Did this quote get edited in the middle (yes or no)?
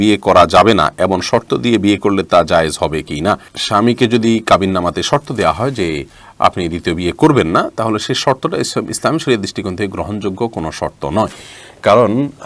no